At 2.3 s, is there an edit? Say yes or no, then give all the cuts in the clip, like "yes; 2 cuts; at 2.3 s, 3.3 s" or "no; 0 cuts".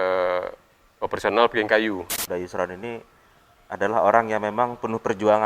yes; 1 cut; at 2.3 s